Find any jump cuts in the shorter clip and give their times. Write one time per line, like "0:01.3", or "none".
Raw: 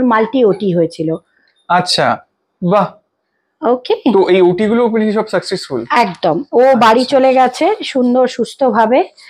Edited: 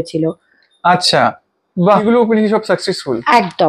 0:02.0